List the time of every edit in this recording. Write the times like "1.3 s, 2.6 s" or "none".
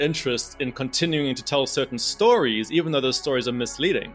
none